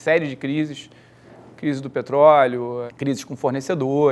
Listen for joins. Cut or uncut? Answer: cut